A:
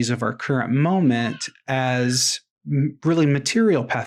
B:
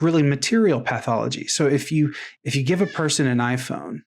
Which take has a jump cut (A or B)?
B